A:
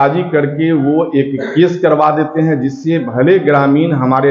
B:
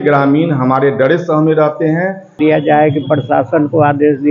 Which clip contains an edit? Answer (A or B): B